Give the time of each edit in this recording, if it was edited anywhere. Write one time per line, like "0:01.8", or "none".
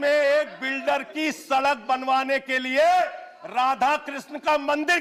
none